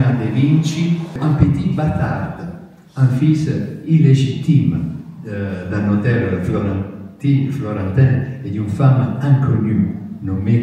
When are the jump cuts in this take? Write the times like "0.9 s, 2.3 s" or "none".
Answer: 1.1 s